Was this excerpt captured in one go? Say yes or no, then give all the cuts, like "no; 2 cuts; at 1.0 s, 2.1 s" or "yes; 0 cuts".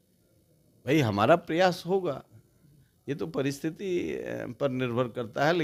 yes; 0 cuts